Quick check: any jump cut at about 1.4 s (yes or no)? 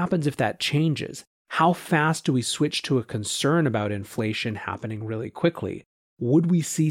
no